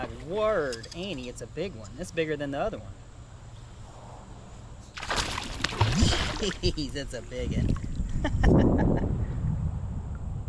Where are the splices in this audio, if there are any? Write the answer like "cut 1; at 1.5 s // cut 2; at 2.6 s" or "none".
cut 1; at 4.9 s